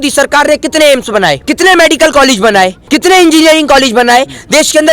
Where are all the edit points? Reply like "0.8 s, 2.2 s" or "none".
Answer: 1.4 s, 2.8 s